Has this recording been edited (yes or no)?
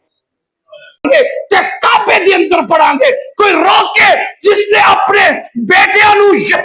yes